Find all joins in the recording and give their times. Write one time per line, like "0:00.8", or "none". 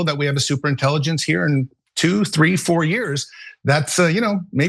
none